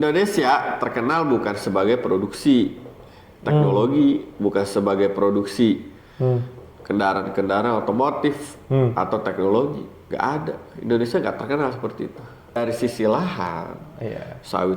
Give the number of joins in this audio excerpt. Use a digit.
1